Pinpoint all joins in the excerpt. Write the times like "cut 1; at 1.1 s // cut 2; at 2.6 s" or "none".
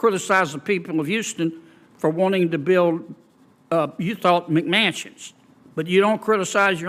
none